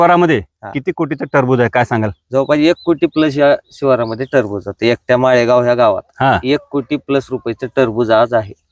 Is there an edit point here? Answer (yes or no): no